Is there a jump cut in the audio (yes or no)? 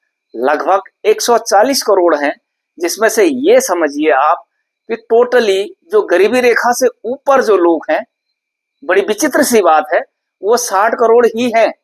no